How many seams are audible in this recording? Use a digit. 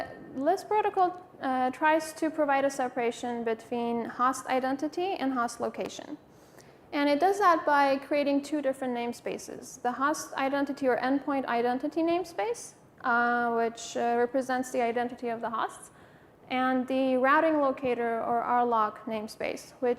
1